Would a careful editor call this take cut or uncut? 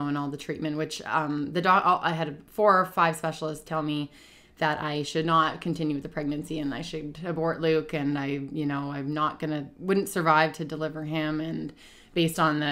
uncut